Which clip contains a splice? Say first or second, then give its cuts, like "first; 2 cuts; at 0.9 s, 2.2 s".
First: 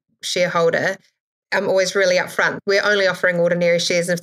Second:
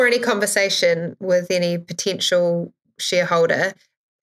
first; 1 cut; at 2.6 s